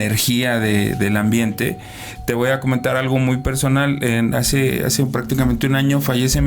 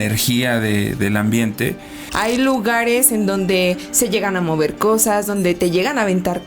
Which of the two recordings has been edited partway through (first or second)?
second